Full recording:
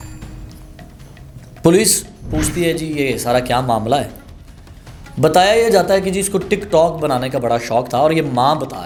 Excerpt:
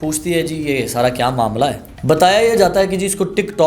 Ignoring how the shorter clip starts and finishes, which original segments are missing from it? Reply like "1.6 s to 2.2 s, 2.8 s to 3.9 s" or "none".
4.2 s to 5.0 s